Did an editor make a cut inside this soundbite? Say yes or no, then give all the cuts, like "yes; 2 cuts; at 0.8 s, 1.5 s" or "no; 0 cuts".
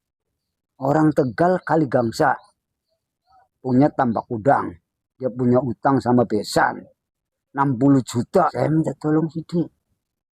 yes; 1 cut; at 8.5 s